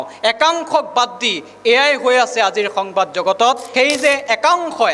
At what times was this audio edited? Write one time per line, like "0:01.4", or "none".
0:03.6